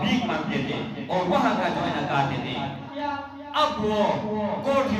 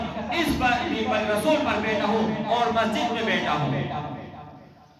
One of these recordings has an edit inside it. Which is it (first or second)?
first